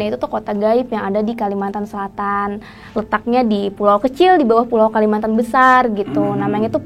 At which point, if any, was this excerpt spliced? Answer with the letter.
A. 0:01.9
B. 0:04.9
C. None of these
C